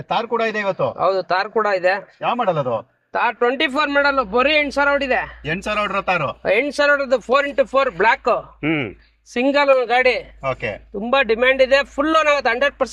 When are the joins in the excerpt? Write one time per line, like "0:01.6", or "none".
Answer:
none

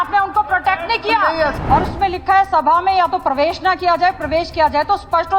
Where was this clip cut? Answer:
0:01.6

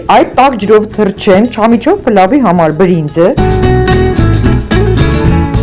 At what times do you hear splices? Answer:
none

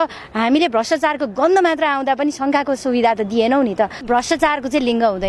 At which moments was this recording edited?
0:04.0

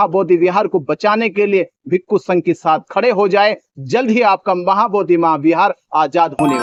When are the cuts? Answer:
none

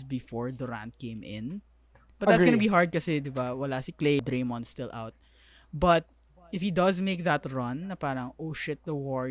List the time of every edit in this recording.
0:04.2

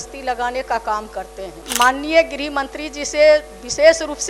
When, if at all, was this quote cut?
0:01.6

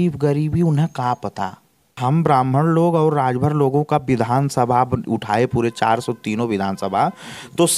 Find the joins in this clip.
0:02.0

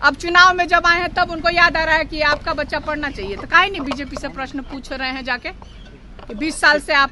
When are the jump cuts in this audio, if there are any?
none

